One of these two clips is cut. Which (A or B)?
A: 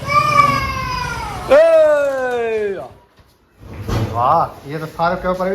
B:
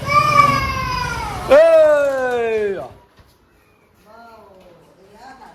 A